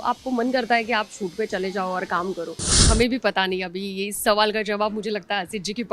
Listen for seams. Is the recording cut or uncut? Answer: cut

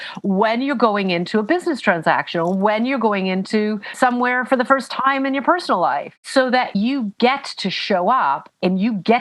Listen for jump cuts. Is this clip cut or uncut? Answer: cut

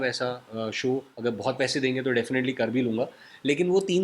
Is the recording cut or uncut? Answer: cut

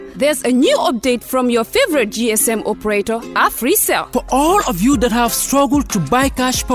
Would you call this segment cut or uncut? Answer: uncut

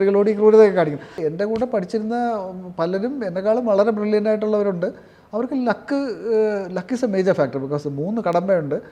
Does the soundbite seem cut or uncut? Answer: cut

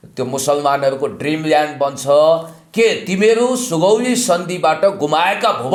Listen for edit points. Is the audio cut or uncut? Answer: uncut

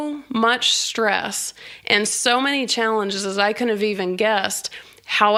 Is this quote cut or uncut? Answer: uncut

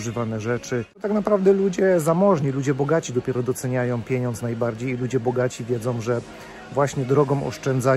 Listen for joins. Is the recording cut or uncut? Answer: cut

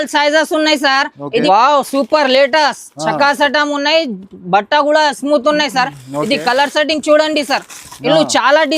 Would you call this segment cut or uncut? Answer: cut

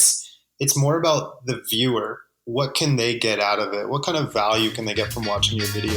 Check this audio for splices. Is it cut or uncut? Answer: uncut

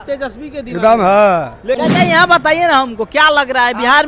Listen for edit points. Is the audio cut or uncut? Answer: cut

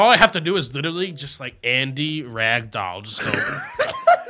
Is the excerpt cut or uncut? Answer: uncut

